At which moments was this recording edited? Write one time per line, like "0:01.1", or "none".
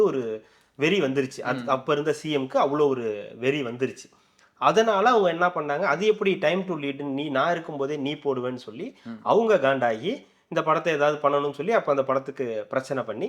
none